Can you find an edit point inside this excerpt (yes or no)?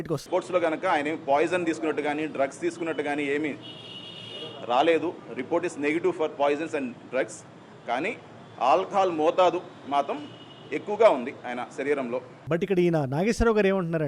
yes